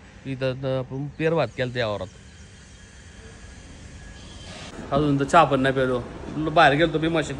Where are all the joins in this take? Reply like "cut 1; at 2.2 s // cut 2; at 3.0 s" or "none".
cut 1; at 4.7 s